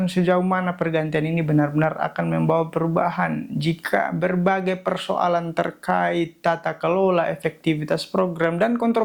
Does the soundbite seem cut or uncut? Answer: uncut